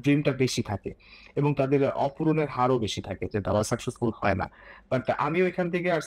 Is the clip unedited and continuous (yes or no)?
yes